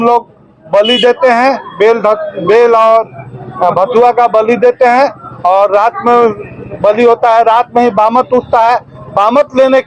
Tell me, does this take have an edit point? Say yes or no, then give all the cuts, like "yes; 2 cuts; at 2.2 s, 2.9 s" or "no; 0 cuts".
no; 0 cuts